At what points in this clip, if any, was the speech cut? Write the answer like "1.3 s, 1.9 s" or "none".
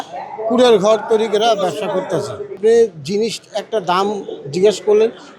2.4 s